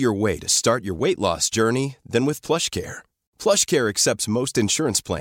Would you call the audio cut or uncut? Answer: uncut